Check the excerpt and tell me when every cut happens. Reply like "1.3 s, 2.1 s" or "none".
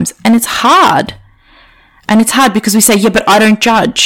none